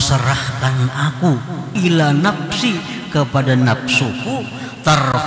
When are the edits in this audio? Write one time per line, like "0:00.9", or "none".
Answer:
0:01.7

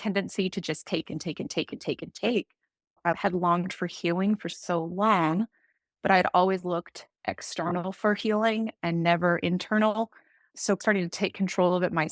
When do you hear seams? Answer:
0:03.0
0:10.7

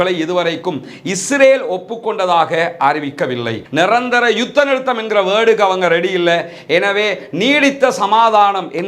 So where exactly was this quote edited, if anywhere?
0:03.6

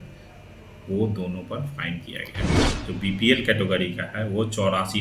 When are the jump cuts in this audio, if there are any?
0:02.6

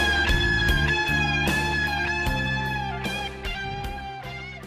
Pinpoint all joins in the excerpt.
0:01.0

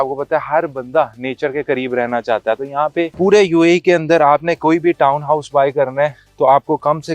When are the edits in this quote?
0:03.1

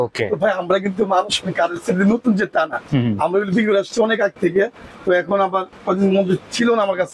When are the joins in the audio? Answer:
none

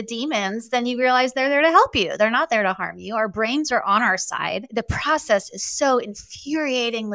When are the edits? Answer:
0:04.7

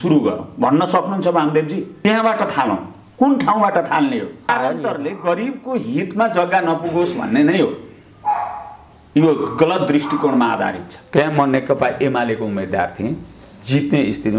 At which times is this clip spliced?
0:04.5
0:11.0

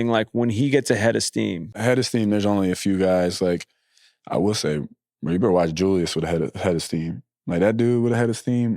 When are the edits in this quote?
0:01.8

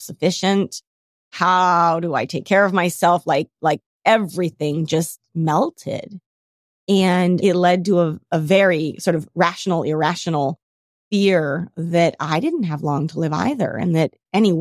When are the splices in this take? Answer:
0:07.4

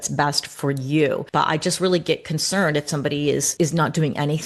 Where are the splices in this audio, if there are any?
0:01.2
0:03.5

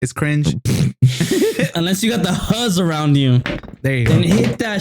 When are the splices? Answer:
0:01.7

